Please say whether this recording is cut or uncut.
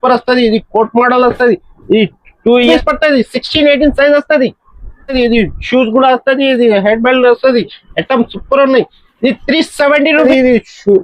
cut